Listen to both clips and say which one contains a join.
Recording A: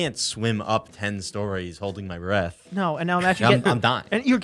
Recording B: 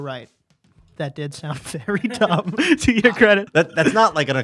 B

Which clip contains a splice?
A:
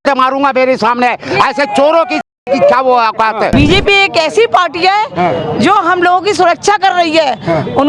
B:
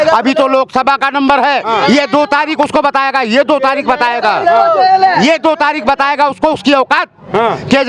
A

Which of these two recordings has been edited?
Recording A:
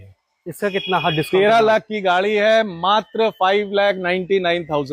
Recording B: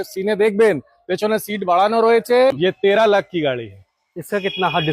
B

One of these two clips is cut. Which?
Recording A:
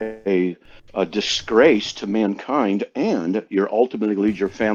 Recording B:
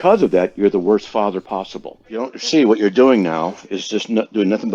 B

